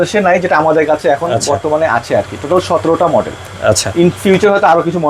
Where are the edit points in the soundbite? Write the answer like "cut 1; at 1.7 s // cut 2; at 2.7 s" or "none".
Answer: none